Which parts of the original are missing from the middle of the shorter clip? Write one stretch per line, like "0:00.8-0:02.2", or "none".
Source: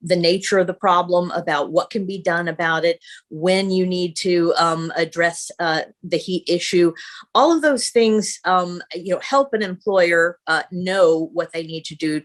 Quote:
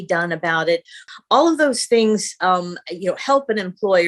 0:03.2-0:07.1